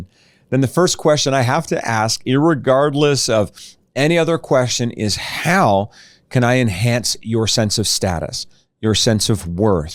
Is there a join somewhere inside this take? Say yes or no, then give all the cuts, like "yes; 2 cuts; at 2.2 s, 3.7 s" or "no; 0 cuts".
no; 0 cuts